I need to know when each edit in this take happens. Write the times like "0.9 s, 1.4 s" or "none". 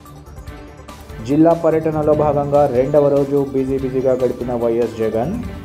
0.9 s